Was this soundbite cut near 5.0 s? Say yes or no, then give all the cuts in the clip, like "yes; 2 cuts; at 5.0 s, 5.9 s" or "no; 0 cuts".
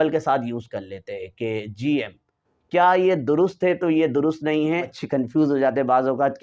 yes; 1 cut; at 5.0 s